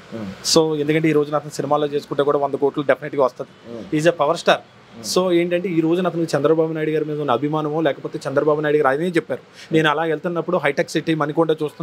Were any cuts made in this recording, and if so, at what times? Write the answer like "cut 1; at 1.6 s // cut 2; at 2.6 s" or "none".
none